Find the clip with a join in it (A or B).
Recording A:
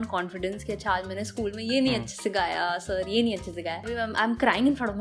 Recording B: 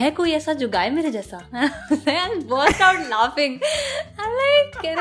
A